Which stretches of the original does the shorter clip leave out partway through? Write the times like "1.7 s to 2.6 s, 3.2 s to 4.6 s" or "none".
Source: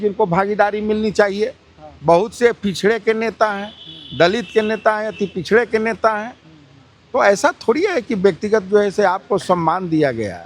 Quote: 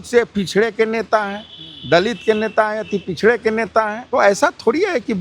6.3 s to 7.0 s